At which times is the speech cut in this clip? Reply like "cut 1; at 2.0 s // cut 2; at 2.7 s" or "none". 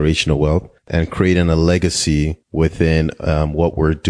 cut 1; at 0.9 s // cut 2; at 2.4 s